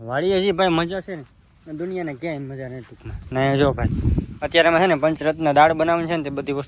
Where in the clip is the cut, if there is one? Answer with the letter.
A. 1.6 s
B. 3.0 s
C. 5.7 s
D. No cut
D